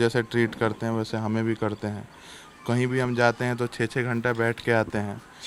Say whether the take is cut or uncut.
uncut